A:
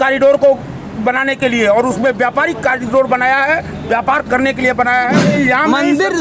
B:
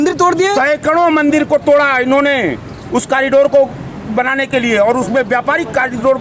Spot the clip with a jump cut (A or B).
A